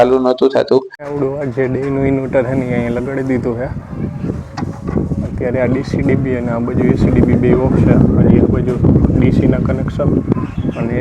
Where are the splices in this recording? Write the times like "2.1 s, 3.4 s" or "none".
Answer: 1.0 s